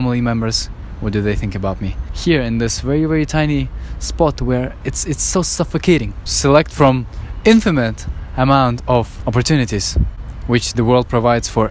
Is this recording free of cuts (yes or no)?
no